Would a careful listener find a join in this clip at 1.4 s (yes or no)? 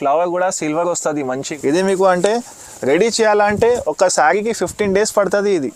yes